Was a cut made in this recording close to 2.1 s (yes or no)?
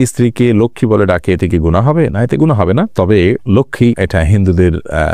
no